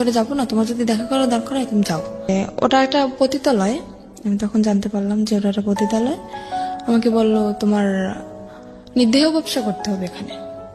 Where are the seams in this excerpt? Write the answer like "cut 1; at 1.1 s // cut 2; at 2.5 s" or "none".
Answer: cut 1; at 2.3 s